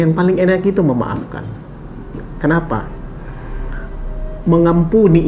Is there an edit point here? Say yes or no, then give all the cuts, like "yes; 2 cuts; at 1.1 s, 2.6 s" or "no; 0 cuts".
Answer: no; 0 cuts